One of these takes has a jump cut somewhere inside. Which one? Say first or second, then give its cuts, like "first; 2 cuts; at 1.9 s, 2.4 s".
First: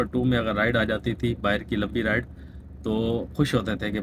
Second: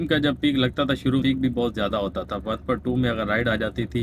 second; 1 cut; at 1.2 s